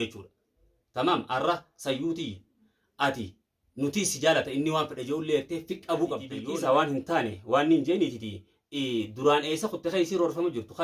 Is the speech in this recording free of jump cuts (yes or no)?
no